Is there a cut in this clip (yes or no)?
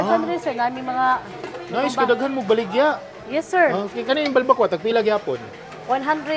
no